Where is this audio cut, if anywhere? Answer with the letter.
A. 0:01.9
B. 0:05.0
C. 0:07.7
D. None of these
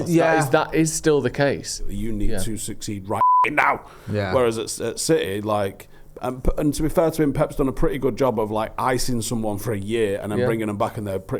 A